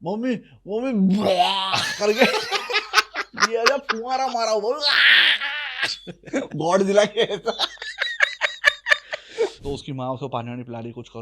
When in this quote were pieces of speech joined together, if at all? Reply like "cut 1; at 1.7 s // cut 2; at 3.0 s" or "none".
cut 1; at 9.6 s